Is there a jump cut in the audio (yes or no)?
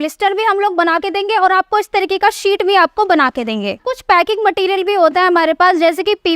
yes